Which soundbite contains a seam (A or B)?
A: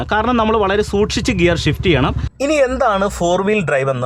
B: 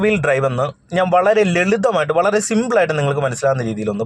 A